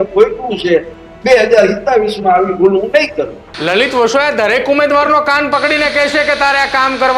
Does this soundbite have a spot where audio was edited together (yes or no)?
yes